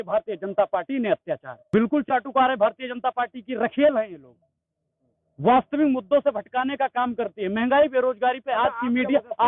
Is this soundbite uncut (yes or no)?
no